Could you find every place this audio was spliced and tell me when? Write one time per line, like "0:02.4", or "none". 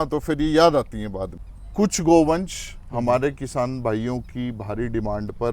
0:01.4